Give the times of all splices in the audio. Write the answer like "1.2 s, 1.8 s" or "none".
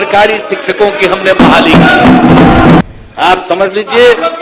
2.8 s